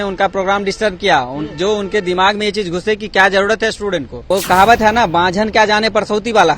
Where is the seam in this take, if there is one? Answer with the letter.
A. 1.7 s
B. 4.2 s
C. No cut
B